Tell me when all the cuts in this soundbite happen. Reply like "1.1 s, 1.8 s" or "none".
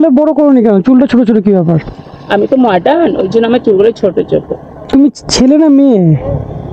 4.9 s